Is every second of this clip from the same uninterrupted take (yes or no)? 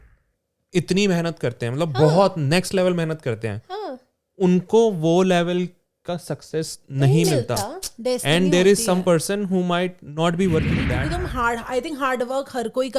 no